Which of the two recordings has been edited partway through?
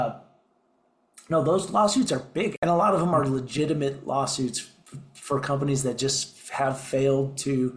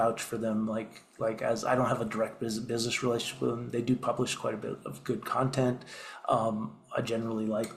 first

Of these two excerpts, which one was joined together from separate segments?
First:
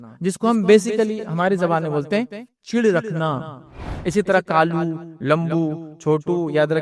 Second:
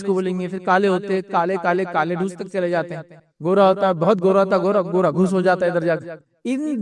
first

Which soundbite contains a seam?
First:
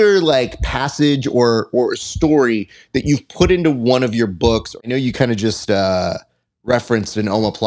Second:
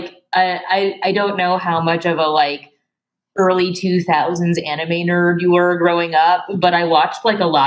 first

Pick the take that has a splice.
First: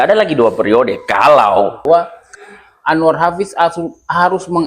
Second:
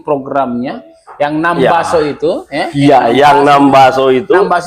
first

